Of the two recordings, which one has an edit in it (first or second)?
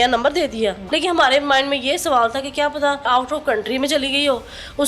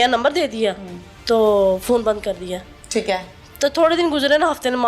first